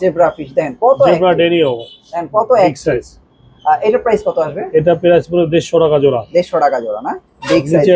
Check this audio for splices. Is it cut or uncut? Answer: uncut